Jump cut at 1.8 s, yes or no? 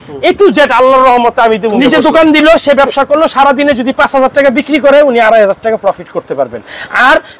yes